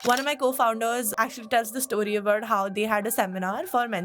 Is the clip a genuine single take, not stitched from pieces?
no; 1 cut; at 1.1 s

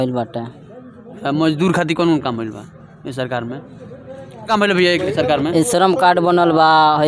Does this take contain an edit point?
no; 0 cuts

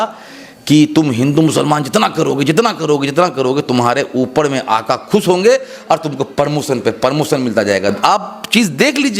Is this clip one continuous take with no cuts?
yes; 0 cuts

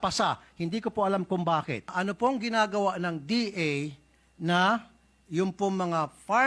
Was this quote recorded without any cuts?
no; 1 cut; at 1.9 s

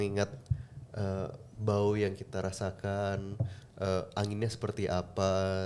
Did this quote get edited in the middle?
no; 0 cuts

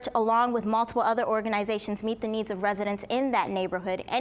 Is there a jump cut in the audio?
no; 0 cuts

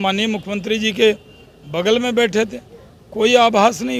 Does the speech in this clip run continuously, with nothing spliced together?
yes; 0 cuts

